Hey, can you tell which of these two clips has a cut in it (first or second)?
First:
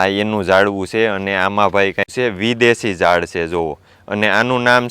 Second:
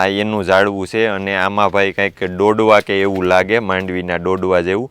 first